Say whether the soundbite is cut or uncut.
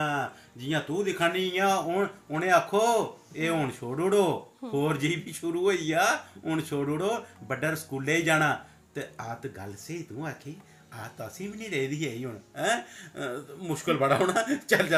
uncut